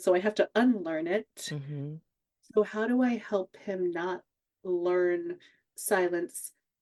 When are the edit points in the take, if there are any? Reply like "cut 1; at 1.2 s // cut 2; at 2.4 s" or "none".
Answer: none